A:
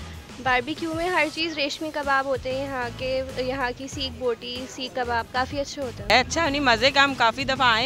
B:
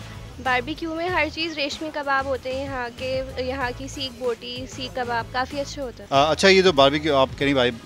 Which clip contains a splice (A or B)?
A